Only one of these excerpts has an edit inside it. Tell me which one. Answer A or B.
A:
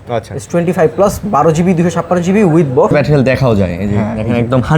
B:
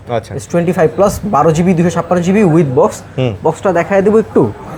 A